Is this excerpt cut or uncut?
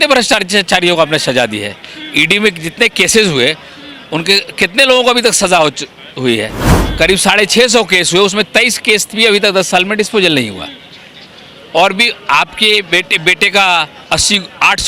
uncut